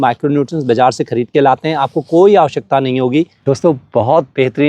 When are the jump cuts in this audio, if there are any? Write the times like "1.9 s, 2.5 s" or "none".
3.3 s